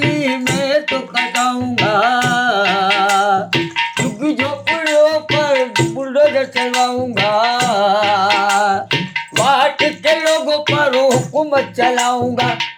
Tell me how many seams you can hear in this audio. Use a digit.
0